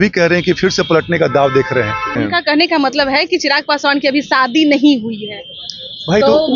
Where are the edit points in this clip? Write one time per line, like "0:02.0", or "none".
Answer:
0:02.1